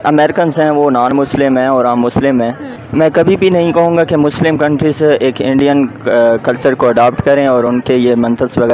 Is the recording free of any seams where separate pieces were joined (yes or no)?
yes